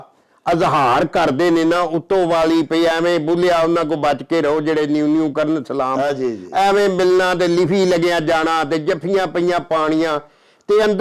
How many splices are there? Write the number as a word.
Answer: zero